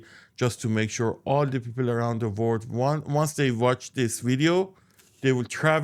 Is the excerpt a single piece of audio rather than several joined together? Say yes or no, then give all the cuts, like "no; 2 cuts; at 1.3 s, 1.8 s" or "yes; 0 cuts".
yes; 0 cuts